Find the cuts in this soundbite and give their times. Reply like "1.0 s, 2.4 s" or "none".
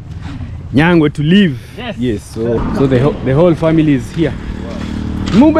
2.6 s